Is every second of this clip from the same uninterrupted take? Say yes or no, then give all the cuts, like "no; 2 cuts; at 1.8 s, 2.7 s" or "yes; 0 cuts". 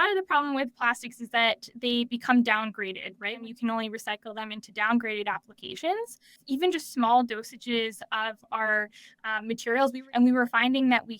no; 3 cuts; at 3.4 s, 6.4 s, 10.0 s